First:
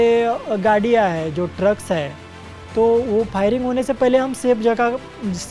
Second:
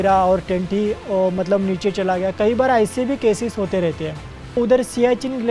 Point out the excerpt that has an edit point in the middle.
second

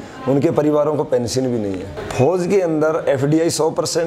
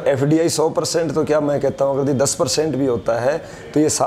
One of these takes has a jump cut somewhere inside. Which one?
first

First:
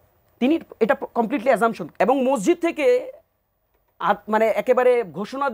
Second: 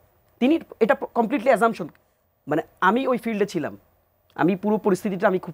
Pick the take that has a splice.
first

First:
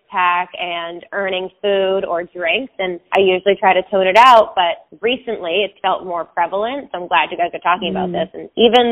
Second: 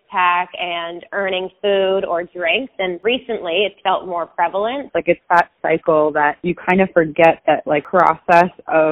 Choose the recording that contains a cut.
second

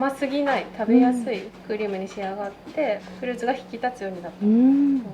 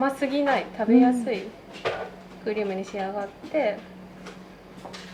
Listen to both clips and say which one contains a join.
first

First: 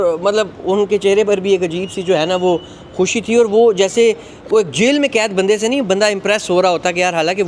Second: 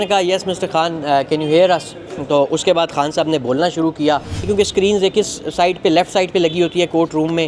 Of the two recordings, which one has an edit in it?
second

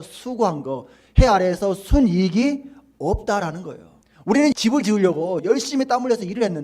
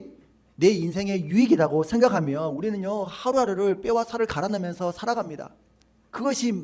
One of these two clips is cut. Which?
first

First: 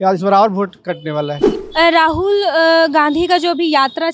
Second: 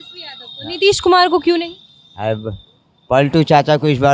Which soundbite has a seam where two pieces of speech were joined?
first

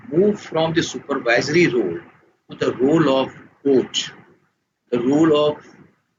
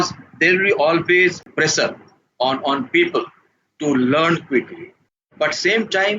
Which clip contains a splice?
second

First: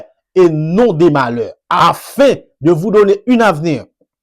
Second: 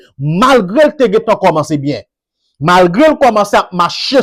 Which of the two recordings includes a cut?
first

